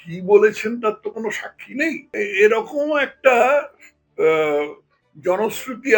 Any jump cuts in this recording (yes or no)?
yes